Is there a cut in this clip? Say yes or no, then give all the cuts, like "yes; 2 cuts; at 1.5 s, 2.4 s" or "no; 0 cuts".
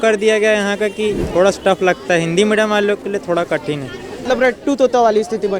yes; 2 cuts; at 1.2 s, 4.2 s